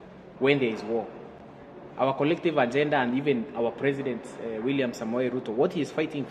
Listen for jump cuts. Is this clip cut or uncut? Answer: uncut